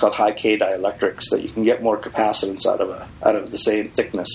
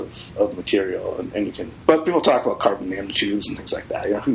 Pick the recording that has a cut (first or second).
second